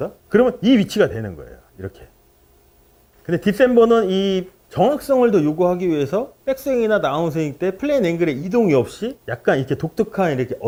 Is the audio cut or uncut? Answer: uncut